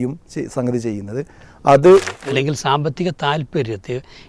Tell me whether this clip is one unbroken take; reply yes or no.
no